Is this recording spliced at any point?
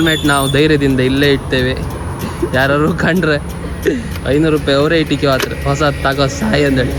no; 0 cuts

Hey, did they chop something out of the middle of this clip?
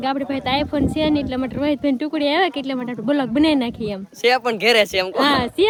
no; 0 cuts

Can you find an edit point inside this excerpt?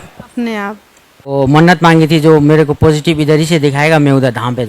yes; 1 cut; at 1.3 s

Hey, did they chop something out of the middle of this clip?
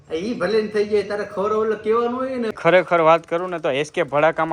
yes; 1 cut; at 2.5 s

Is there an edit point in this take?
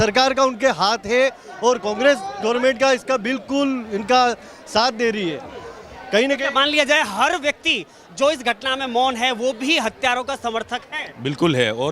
no; 0 cuts

